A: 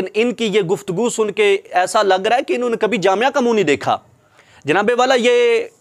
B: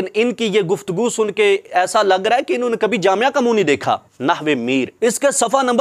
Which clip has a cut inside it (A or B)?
B